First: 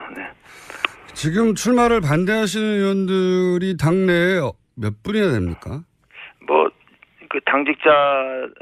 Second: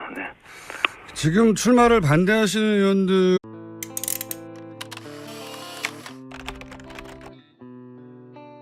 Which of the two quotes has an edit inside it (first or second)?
first